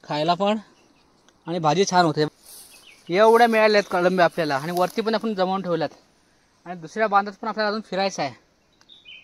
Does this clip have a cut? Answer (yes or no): yes